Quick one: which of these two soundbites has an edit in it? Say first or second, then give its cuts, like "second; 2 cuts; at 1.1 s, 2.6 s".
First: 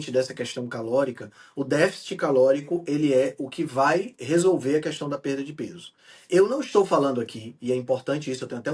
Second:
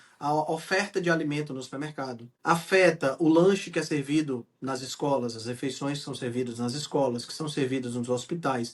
second; 1 cut; at 2.3 s